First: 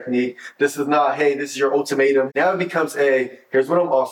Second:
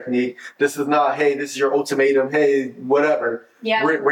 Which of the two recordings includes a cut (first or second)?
first